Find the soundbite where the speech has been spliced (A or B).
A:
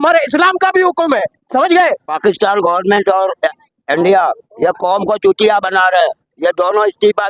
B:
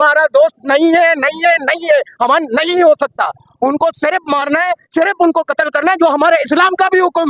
A